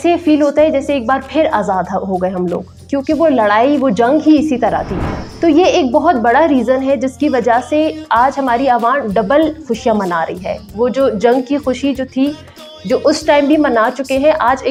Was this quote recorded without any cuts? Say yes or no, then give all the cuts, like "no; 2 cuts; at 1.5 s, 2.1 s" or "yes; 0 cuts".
yes; 0 cuts